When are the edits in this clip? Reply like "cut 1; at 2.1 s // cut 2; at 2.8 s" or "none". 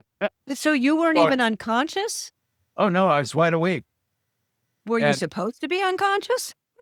none